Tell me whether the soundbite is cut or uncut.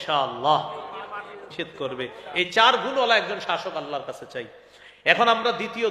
cut